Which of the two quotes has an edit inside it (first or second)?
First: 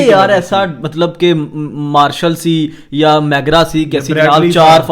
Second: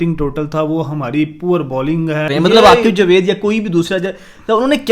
second